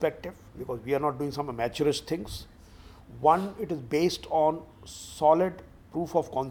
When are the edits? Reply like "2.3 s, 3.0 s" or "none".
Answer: none

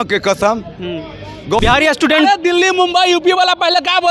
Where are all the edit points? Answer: 1.6 s

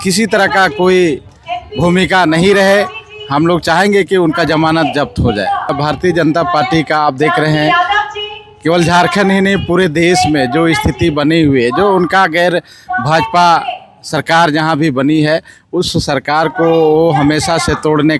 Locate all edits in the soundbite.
5.7 s

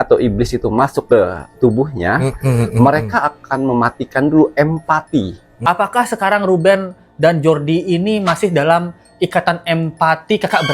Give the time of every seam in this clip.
5.5 s

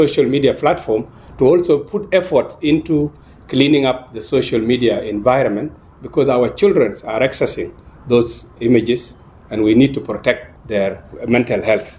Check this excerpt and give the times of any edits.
10.9 s

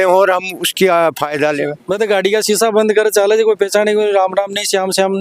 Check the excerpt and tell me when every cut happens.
1.8 s

